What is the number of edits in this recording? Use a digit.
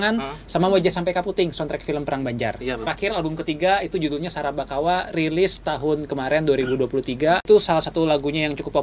2